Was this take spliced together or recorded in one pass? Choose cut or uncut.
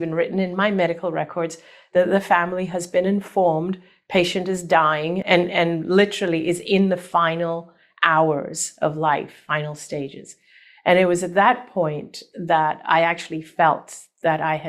cut